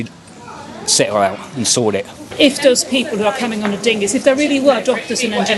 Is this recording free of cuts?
no; 1 cut; at 2.2 s

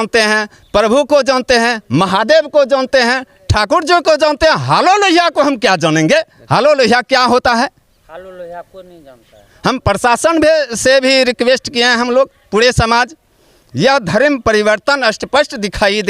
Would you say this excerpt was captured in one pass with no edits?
yes; 0 cuts

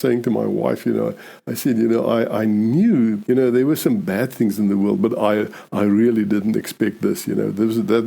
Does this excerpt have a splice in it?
yes; 1 cut; at 3.2 s

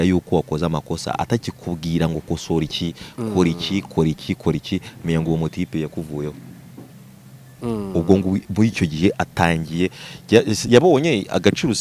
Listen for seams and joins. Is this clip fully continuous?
yes; 0 cuts

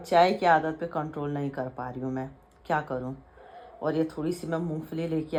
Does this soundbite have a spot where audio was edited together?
no; 0 cuts

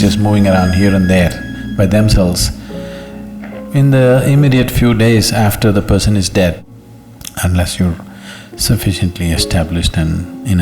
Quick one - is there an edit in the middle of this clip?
yes; 1 cut; at 6.6 s

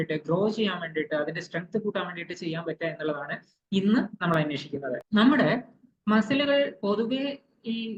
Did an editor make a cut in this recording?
no; 0 cuts

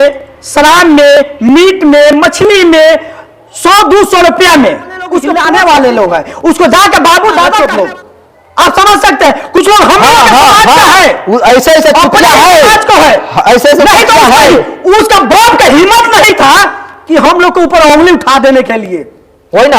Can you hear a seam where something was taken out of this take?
yes; 2 cuts; at 5.3 s, 7.6 s

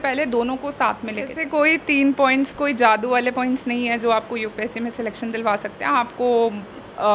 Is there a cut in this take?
yes; 1 cut; at 1.4 s

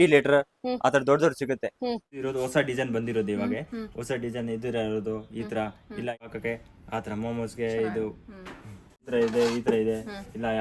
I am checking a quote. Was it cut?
yes; 3 cuts; at 2.1 s, 6.1 s, 9.0 s

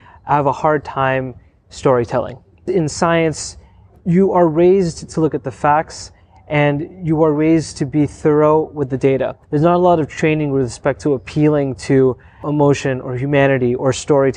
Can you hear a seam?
yes; 3 cuts; at 2.6 s, 9.4 s, 12.4 s

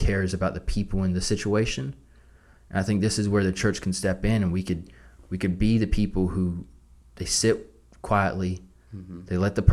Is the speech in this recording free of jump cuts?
yes; 0 cuts

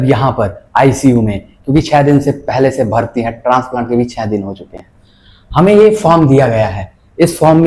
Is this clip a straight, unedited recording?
yes; 0 cuts

